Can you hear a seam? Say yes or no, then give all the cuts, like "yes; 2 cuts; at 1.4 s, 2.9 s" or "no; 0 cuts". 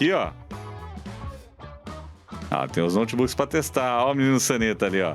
no; 0 cuts